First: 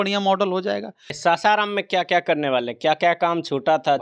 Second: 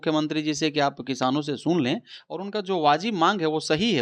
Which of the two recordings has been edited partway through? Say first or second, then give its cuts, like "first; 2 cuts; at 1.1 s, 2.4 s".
first; 1 cut; at 1.1 s